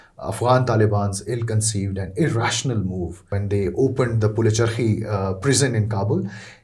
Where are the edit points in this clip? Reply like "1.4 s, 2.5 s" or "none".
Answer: 3.3 s